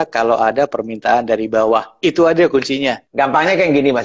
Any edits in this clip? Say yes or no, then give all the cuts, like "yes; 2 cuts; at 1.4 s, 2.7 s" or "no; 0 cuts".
yes; 1 cut; at 3.0 s